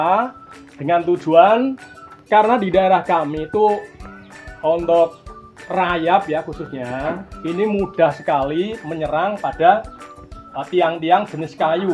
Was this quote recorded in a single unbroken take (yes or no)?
yes